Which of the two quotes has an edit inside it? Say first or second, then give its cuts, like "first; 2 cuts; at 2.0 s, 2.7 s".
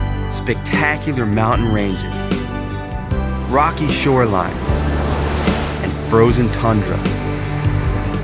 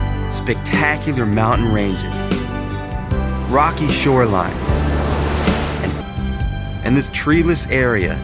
first; 1 cut; at 6.0 s